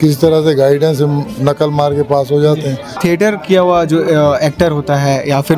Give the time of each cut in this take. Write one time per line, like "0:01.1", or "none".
0:03.0